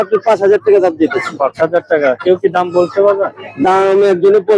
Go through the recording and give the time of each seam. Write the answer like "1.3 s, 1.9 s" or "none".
none